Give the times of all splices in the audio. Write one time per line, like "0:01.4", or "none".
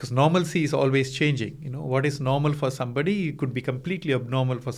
none